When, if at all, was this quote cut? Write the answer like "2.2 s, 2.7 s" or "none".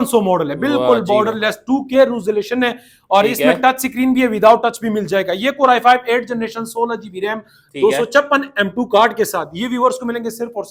none